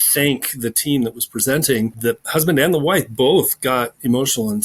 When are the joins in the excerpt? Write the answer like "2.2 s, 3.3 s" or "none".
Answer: 1.9 s